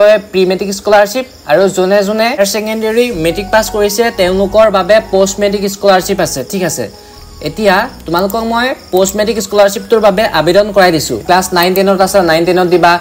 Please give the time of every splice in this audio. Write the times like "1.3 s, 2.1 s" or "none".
2.4 s